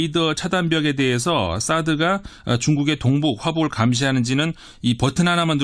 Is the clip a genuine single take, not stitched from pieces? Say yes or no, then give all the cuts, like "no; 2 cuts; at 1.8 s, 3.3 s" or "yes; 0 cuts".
no; 1 cut; at 4.1 s